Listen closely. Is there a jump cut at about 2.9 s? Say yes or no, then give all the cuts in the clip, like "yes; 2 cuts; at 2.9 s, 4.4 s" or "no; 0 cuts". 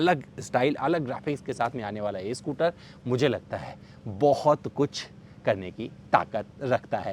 no; 0 cuts